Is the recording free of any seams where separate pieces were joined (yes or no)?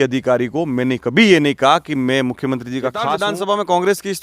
no